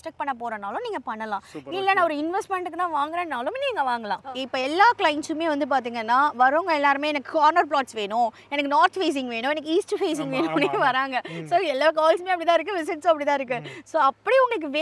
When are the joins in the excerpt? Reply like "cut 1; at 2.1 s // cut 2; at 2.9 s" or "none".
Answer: cut 1; at 4.2 s